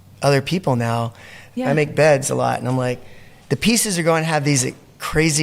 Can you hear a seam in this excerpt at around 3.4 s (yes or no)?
no